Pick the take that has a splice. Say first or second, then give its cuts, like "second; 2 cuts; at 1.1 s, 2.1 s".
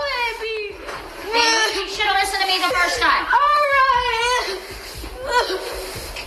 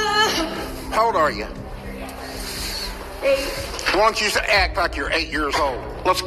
first; 1 cut; at 5.1 s